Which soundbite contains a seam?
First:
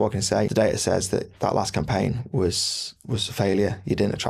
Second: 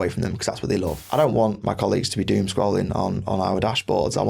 second; 1 cut; at 1.0 s

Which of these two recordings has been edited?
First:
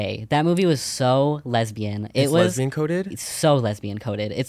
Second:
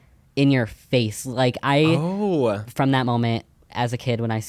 second; 1 cut; at 2.7 s

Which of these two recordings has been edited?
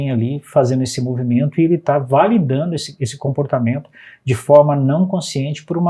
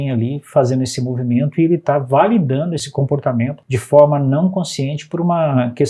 second; 2 cuts; at 2.9 s, 3.6 s

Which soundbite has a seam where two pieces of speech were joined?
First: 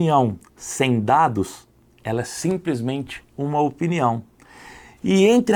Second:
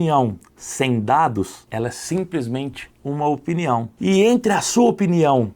second; 2 cuts; at 1.6 s, 3.9 s

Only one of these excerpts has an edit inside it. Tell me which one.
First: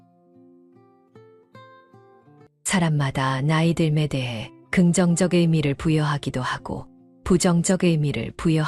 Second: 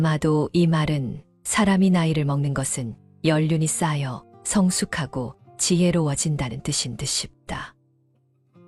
first; 1 cut; at 2.5 s

